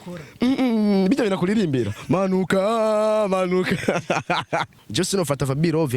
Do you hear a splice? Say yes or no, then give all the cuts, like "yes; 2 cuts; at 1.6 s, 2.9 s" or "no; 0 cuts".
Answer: yes; 1 cut; at 4.8 s